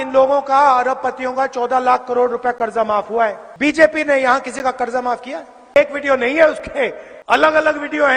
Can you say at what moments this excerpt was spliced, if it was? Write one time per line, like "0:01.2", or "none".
0:03.5
0:05.8
0:07.1